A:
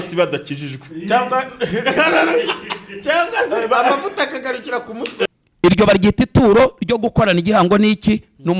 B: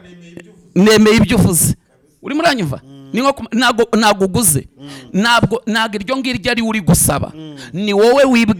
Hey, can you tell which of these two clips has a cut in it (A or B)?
A